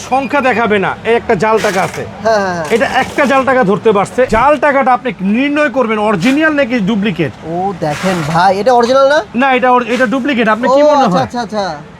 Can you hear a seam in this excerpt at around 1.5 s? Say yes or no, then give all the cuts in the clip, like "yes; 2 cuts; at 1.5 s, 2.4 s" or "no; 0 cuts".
no; 1 cut; at 4.3 s